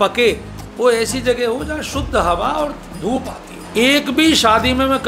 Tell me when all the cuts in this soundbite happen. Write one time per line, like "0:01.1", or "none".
0:03.6